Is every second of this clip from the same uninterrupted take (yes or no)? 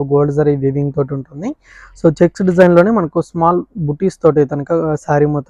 yes